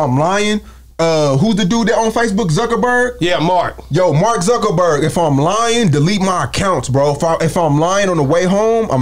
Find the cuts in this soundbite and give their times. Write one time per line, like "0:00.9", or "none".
none